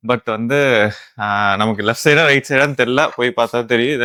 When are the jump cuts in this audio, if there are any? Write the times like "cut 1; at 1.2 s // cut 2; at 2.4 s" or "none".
none